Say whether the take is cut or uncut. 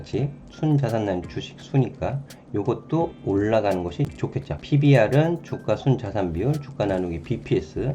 cut